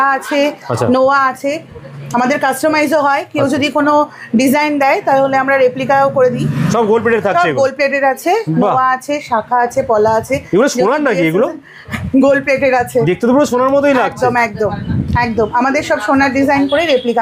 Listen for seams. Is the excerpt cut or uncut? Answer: uncut